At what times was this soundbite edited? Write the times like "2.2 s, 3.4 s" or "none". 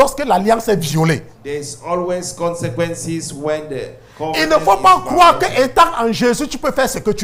none